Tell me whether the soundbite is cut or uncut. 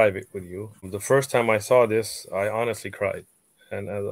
cut